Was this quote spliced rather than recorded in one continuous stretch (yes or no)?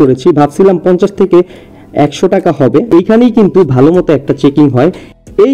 yes